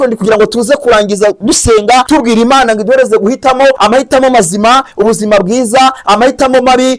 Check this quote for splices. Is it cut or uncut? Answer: cut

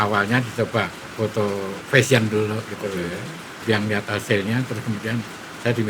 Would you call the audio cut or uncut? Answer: cut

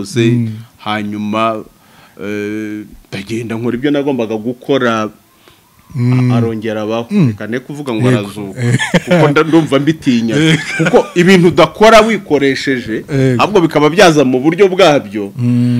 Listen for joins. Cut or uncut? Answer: uncut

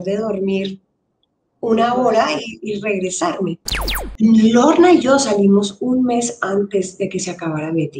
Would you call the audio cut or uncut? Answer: cut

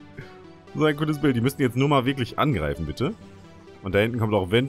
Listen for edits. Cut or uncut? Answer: uncut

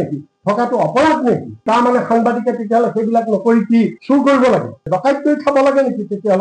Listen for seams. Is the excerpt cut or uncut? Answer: uncut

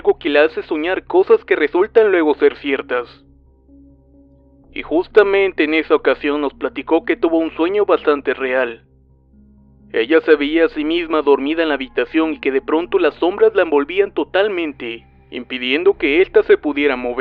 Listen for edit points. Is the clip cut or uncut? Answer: uncut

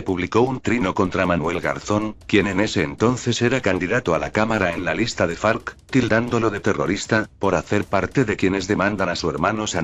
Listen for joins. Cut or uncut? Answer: cut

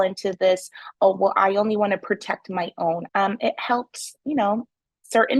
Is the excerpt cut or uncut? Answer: cut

